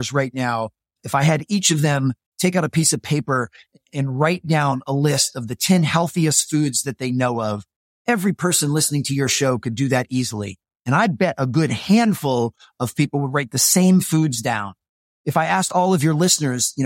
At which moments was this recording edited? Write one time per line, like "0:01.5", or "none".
0:01.0